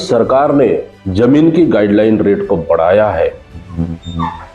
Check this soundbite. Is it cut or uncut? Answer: cut